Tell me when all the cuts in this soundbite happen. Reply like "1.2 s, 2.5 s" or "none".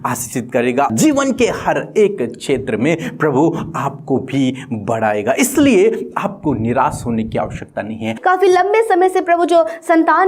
0.9 s, 8.2 s